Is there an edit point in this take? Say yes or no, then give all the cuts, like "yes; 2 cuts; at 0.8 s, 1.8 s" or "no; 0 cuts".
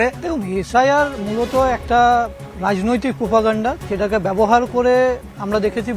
no; 0 cuts